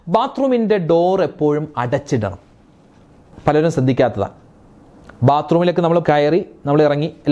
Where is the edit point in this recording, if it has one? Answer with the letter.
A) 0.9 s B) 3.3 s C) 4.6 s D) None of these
D